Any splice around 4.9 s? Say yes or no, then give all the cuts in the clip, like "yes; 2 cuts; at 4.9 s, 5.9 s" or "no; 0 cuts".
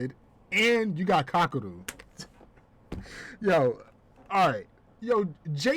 yes; 1 cut; at 4.9 s